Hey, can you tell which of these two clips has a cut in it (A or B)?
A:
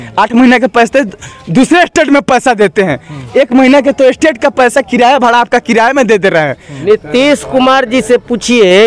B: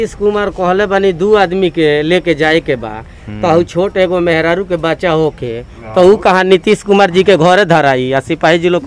A